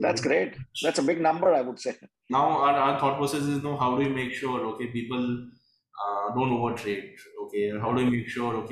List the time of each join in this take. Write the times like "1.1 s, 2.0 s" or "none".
2.1 s